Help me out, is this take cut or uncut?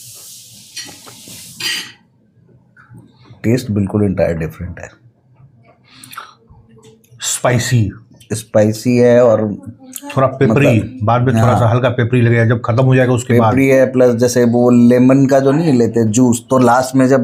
uncut